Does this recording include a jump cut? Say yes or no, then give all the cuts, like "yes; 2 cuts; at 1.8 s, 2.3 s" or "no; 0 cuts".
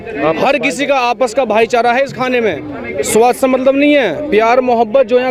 no; 0 cuts